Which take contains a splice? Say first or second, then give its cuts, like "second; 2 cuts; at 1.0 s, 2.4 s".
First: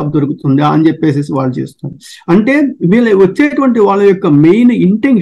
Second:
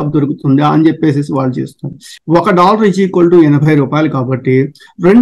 second; 1 cut; at 2.1 s